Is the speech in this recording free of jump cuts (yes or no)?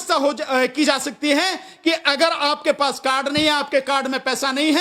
yes